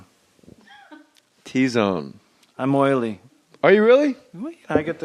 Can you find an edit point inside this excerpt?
no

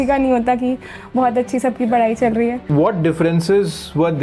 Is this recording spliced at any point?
yes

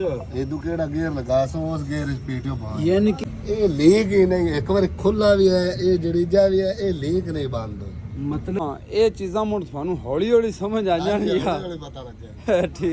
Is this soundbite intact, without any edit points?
no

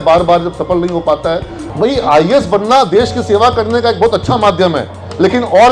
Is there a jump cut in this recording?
yes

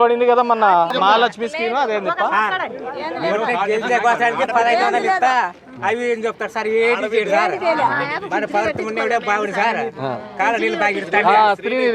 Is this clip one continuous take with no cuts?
no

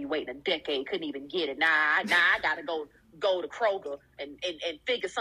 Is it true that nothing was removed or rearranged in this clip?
yes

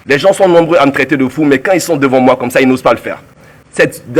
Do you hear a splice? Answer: no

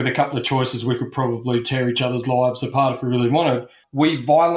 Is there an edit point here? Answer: no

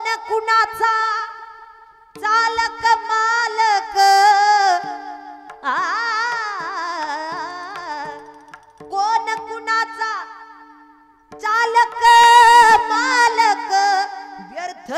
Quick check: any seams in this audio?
no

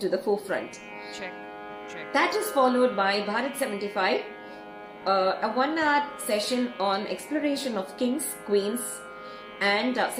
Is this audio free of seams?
yes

